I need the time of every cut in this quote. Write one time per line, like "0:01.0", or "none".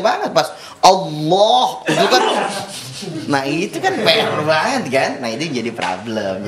none